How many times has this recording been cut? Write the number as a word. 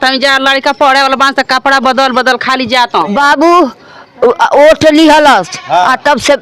one